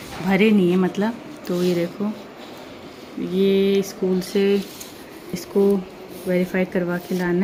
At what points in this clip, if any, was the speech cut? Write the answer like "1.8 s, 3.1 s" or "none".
none